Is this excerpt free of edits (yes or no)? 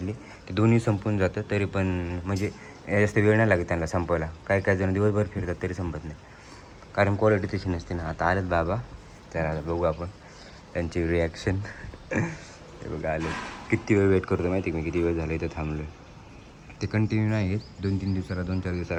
yes